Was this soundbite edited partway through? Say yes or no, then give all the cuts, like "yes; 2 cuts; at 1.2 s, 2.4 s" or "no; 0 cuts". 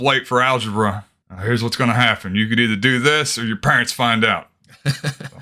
no; 0 cuts